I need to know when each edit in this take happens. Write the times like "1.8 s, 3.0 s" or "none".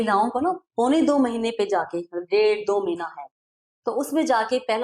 none